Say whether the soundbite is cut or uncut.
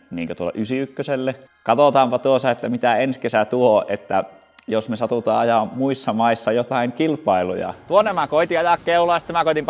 cut